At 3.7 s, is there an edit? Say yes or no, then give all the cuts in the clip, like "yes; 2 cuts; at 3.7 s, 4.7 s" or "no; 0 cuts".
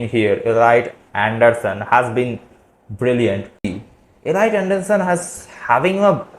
yes; 1 cut; at 3.7 s